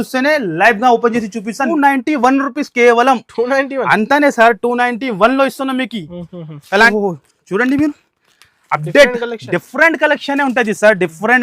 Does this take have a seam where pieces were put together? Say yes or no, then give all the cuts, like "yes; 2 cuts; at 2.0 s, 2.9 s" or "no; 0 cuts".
yes; 2 cuts; at 1.7 s, 6.9 s